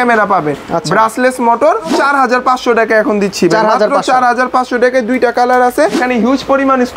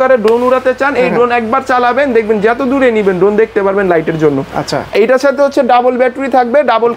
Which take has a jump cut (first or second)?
first